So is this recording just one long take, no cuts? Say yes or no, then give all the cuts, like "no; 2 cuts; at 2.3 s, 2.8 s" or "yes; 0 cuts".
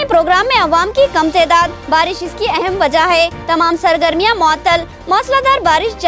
yes; 0 cuts